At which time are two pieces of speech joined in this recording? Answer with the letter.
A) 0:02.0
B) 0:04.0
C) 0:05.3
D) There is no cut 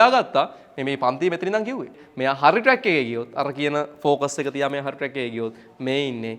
A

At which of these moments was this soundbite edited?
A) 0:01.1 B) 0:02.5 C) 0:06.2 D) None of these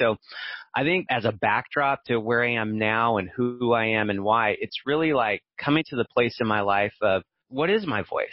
A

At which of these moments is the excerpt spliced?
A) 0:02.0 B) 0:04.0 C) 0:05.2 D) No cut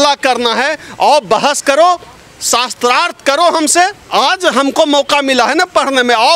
B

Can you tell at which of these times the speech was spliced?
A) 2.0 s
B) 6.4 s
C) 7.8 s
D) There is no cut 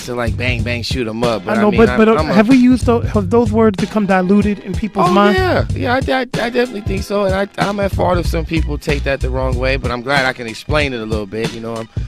C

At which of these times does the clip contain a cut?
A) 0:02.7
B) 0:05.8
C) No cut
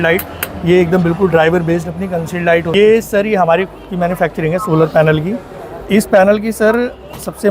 A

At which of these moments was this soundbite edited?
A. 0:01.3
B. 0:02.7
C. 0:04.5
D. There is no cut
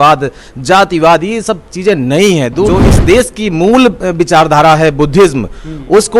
B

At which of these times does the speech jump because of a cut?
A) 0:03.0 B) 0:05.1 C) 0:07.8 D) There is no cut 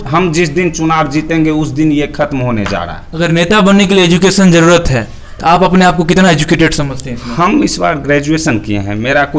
A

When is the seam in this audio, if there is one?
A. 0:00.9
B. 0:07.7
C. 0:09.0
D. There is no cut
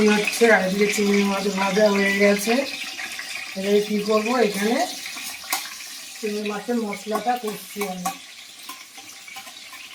D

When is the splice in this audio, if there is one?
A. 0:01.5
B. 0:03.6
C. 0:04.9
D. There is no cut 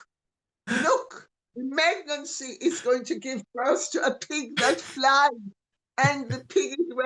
D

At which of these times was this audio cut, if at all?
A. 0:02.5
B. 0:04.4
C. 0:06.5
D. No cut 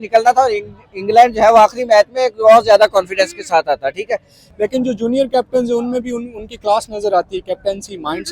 B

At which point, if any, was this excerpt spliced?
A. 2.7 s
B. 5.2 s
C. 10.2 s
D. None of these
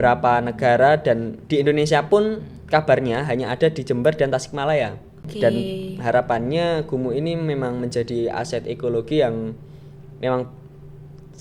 B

